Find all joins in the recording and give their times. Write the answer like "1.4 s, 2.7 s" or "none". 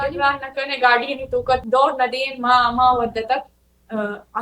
1.6 s